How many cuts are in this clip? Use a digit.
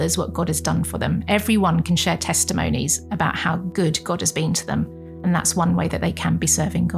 2